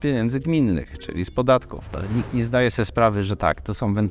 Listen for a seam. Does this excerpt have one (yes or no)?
yes